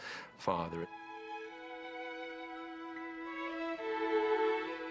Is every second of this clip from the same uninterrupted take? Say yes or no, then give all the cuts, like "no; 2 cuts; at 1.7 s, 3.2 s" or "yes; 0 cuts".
yes; 0 cuts